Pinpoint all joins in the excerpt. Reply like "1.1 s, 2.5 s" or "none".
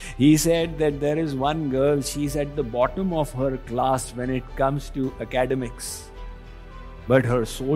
none